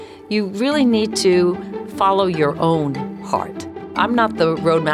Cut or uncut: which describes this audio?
cut